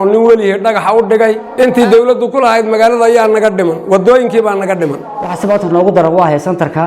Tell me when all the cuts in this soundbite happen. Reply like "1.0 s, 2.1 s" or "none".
1.5 s, 5.4 s